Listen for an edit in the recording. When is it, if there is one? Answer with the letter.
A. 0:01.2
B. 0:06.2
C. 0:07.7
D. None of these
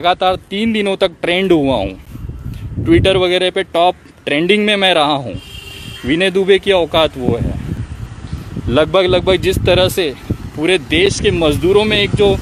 D